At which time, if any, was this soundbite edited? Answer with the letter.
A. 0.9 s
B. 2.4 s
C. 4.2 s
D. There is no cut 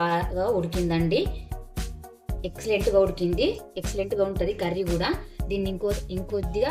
D